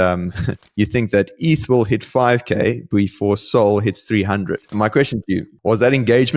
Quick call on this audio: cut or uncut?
cut